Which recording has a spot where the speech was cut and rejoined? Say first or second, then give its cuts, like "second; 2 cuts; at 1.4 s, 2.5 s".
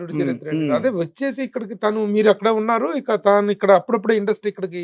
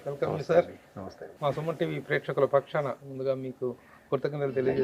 second; 1 cut; at 1.2 s